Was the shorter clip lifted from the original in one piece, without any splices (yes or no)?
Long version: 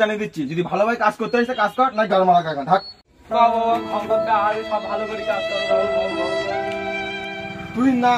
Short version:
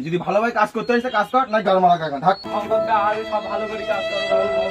no